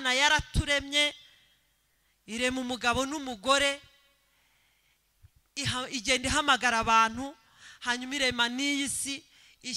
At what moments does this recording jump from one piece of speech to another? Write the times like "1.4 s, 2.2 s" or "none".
none